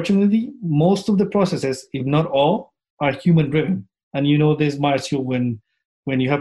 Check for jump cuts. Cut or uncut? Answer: uncut